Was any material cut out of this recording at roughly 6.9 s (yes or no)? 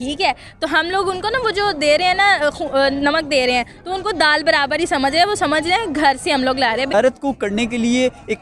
yes